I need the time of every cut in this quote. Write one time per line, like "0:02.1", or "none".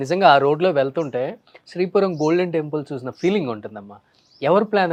none